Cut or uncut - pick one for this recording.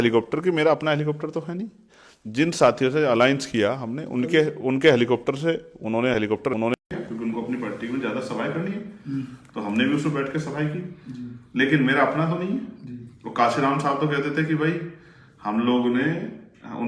uncut